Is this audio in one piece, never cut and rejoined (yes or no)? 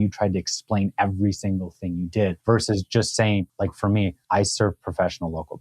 no